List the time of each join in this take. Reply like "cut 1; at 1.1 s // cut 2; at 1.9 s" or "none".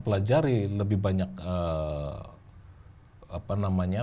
none